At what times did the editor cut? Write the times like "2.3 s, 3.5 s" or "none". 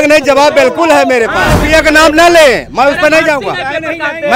1.5 s